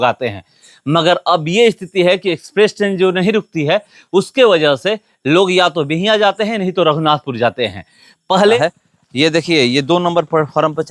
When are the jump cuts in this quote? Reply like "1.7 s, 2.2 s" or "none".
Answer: 8.6 s